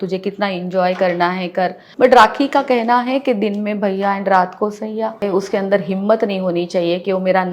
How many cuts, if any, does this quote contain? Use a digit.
2